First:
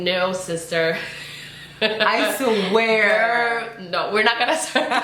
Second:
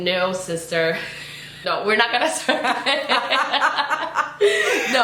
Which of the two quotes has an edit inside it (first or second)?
second